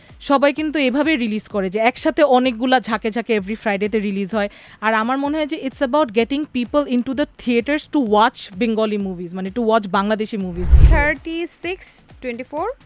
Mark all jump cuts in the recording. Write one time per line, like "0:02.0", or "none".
0:10.7

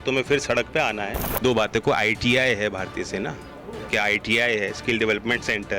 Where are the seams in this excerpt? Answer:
0:01.2

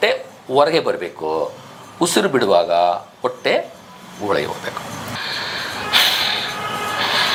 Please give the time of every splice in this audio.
none

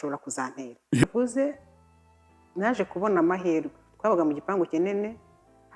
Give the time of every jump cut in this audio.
0:01.0

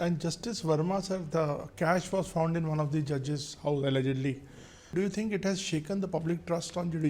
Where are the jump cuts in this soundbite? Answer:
0:04.9

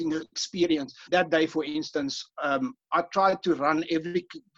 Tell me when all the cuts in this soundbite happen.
0:01.0

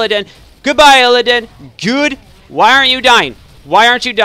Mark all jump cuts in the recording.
none

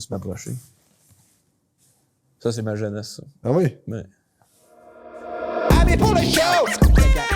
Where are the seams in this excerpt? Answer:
0:05.0

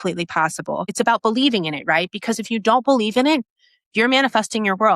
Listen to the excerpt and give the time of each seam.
0:00.9

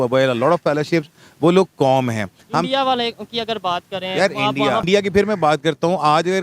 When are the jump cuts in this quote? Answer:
0:04.8

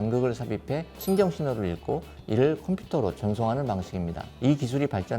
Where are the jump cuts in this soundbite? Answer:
0:04.3

